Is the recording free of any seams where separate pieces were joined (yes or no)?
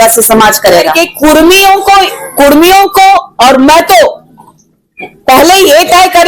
no